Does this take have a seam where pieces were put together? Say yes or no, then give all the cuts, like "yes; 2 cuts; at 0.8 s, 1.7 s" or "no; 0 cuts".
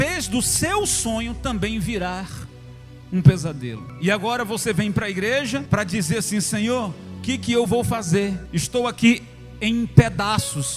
yes; 3 cuts; at 3.8 s, 5.6 s, 8.5 s